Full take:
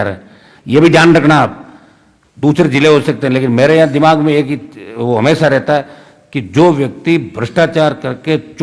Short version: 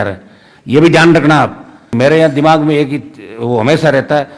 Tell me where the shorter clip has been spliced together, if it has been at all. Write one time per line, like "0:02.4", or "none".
0:01.9